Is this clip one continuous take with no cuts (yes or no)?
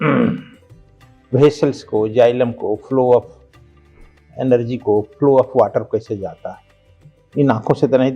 yes